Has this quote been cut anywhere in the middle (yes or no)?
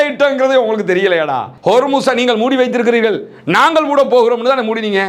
no